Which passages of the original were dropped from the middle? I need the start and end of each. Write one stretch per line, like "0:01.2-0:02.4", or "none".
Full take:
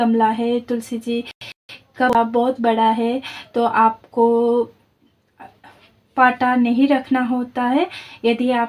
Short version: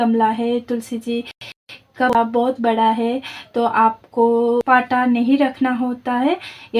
0:04.6-0:06.1